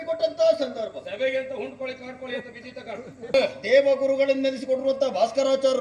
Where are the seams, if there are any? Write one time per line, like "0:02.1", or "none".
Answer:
0:03.3